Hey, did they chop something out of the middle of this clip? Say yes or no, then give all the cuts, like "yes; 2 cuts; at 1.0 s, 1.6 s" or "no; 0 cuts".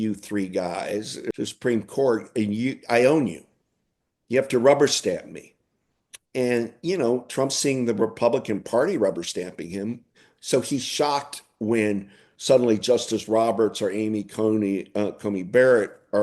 yes; 1 cut; at 1.3 s